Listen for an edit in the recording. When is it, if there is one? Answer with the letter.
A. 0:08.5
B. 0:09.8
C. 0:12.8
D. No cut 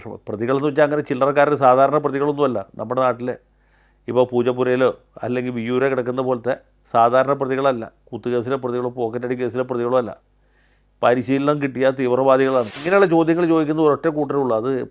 C